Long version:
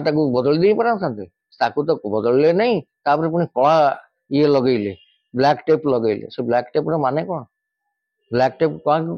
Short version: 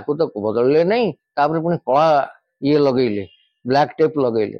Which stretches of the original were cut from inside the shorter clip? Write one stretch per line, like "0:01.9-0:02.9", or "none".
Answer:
none